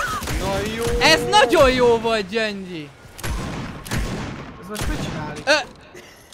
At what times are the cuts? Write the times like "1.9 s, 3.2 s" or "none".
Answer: none

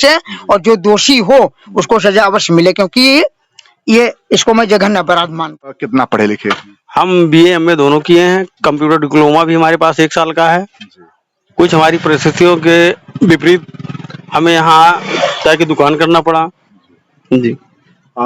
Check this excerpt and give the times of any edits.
5.8 s

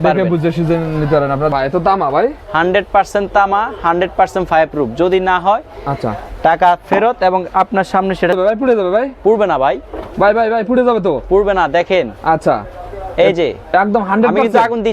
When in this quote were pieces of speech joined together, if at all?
1.5 s, 8.4 s

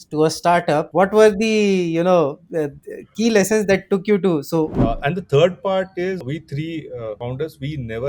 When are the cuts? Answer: 0.9 s, 4.7 s, 6.2 s, 7.2 s

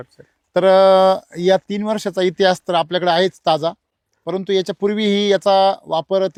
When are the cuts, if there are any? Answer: none

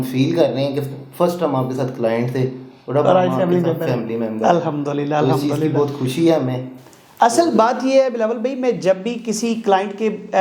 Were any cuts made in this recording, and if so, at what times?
none

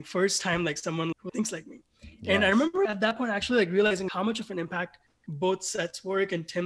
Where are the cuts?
1.2 s, 2.9 s, 4.1 s

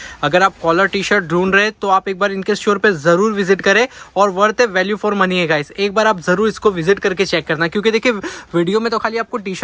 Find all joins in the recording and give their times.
none

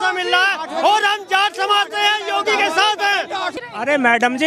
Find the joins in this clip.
3.6 s

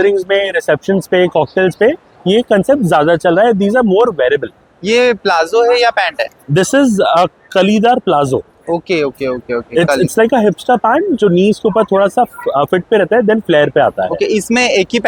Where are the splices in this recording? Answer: none

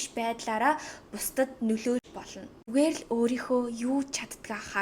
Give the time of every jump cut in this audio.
2.6 s

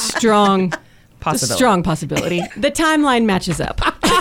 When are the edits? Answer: 2.4 s

